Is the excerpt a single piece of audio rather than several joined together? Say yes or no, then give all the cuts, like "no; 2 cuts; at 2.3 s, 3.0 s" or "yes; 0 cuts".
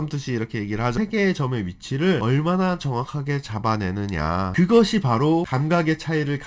yes; 0 cuts